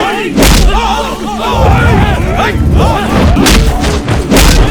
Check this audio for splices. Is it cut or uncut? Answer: cut